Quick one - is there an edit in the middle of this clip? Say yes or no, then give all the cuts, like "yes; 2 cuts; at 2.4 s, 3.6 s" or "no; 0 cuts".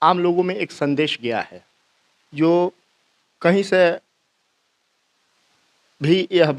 no; 0 cuts